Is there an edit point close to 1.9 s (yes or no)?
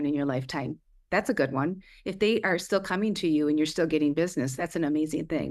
no